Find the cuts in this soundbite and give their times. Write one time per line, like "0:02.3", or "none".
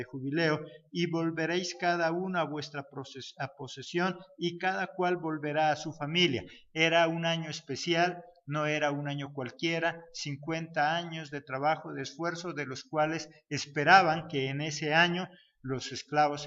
0:01.4